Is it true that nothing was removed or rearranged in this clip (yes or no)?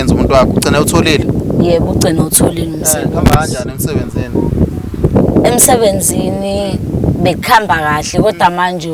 yes